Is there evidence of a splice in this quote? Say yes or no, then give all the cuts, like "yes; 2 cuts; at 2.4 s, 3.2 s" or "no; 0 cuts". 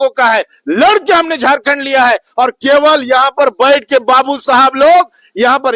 no; 0 cuts